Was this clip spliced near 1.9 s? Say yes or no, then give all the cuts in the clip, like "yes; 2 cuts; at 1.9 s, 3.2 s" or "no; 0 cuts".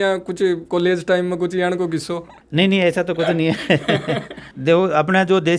no; 1 cut; at 4.6 s